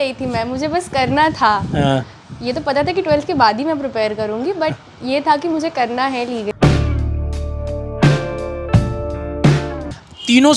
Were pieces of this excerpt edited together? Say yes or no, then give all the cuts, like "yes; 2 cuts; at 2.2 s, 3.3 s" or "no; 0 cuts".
no; 0 cuts